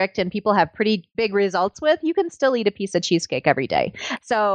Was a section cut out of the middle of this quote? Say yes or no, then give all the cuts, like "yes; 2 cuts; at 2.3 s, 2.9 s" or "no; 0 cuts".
yes; 1 cut; at 1.1 s